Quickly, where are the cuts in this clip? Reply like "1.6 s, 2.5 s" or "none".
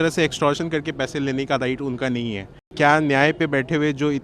2.6 s